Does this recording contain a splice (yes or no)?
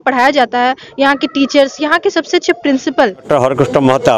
yes